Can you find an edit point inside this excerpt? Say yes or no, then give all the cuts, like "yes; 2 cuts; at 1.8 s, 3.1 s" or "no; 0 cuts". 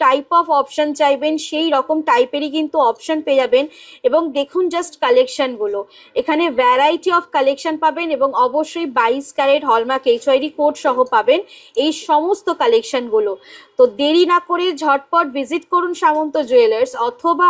no; 0 cuts